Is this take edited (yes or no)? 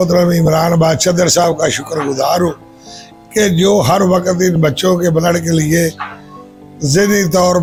no